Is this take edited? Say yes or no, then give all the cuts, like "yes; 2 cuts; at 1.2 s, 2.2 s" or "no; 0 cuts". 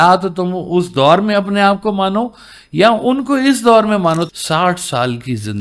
yes; 1 cut; at 4.3 s